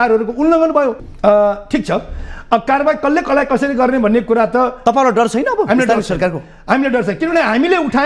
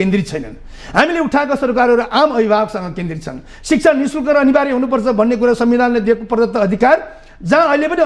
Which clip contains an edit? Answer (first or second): first